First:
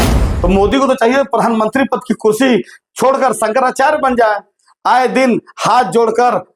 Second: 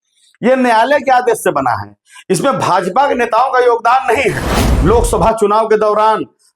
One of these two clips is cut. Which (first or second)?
second